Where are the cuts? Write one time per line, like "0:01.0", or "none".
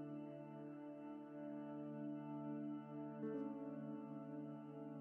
none